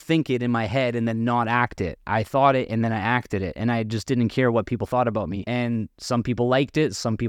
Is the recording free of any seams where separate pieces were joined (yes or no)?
no